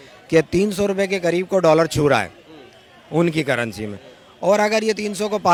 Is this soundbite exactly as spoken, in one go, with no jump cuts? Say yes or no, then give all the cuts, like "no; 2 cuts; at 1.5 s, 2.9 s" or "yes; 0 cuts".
yes; 0 cuts